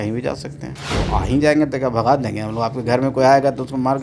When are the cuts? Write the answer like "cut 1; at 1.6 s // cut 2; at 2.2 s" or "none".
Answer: cut 1; at 1.0 s